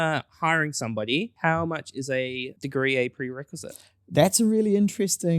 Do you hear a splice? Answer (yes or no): yes